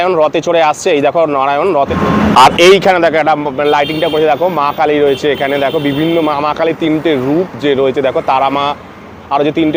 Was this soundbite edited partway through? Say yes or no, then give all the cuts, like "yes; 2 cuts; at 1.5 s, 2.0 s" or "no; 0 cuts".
no; 0 cuts